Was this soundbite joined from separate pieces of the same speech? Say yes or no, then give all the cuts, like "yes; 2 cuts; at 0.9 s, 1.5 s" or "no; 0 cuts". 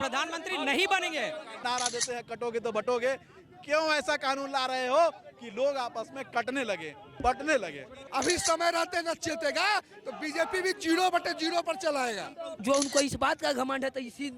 yes; 3 cuts; at 1.6 s, 8.1 s, 12.5 s